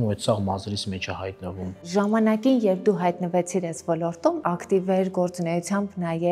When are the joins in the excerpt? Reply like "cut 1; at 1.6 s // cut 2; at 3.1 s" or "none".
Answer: cut 1; at 1.8 s // cut 2; at 4.4 s